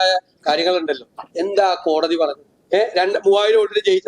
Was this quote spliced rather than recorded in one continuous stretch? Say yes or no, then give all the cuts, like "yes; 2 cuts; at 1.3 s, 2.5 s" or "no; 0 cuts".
yes; 1 cut; at 2.5 s